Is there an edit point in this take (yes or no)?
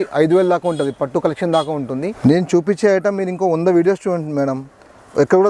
yes